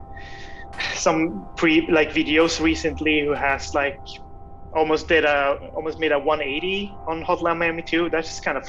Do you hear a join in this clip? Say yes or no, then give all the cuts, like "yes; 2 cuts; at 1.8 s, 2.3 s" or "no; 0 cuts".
no; 0 cuts